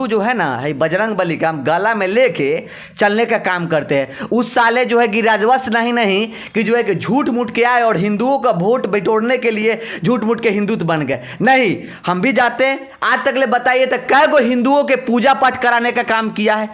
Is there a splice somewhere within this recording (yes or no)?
no